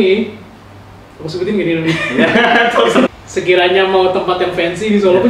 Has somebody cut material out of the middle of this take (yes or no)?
yes